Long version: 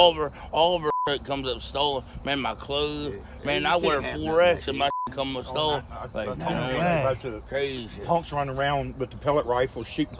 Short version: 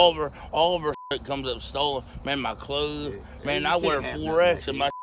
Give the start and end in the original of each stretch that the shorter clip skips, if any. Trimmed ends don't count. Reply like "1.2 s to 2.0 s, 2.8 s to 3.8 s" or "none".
none